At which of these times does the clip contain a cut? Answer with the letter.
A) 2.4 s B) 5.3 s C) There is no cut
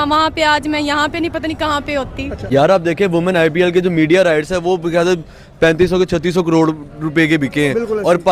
C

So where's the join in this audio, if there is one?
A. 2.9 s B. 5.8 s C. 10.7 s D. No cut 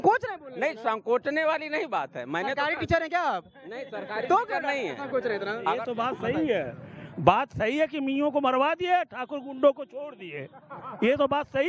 B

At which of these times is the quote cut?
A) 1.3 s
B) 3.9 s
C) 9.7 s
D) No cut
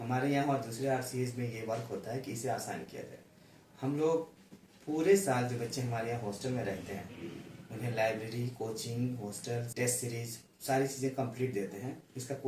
C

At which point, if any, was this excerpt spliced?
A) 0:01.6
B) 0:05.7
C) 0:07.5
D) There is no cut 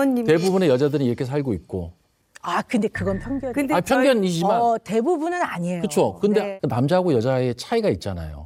D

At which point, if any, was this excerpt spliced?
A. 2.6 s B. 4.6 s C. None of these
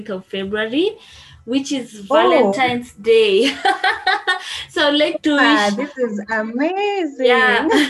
C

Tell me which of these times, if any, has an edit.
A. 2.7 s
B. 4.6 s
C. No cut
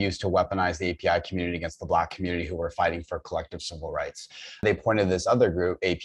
B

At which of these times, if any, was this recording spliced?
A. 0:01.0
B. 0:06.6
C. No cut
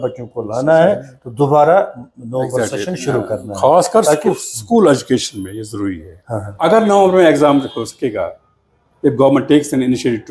B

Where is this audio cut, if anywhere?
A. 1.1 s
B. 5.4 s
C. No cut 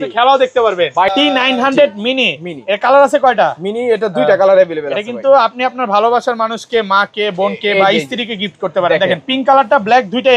A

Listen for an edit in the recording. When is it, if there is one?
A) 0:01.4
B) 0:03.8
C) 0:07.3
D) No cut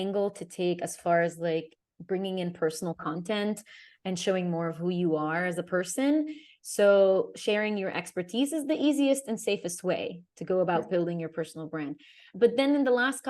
D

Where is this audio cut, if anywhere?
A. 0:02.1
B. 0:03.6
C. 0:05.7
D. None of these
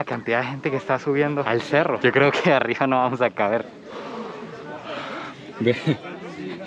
D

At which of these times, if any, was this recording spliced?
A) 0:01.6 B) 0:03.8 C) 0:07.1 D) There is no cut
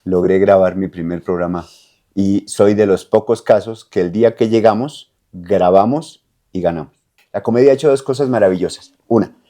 C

